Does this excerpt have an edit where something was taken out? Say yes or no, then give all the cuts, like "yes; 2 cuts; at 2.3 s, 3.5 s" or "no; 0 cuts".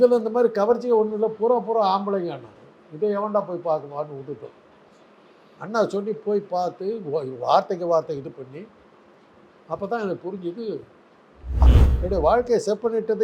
yes; 1 cut; at 11.7 s